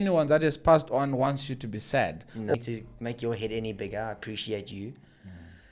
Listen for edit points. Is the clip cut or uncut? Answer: cut